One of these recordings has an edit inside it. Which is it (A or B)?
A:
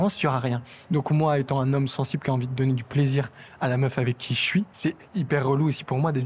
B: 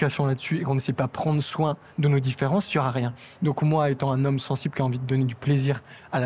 A